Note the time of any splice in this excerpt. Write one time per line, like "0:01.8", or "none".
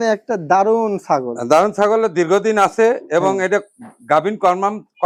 none